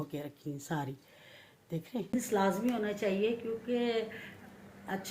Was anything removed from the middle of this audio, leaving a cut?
yes; 1 cut; at 2.1 s

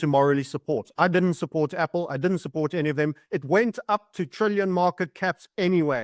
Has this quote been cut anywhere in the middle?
no; 0 cuts

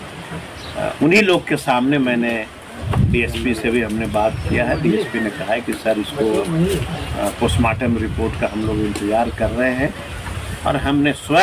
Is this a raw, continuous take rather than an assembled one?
yes; 0 cuts

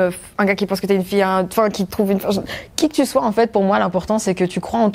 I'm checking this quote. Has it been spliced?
no; 0 cuts

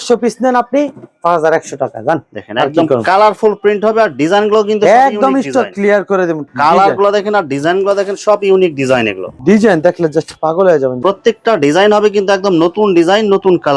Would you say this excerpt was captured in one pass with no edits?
no; 2 cuts; at 6.5 s, 11.0 s

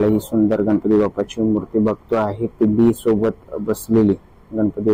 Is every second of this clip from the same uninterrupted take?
yes; 0 cuts

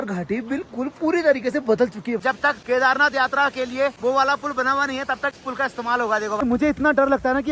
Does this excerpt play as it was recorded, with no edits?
no; 4 cuts; at 2.2 s, 4.0 s, 5.4 s, 6.4 s

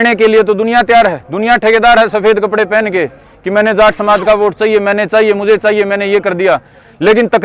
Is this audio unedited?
yes; 0 cuts

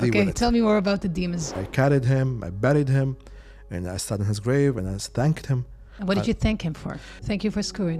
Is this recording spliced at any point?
yes; 3 cuts; at 1.6 s, 5.9 s, 7.1 s

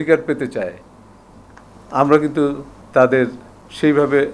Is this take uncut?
yes; 0 cuts

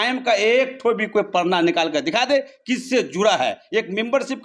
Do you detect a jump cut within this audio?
no; 0 cuts

